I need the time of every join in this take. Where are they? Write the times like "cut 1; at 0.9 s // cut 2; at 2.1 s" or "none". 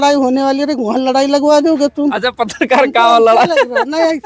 none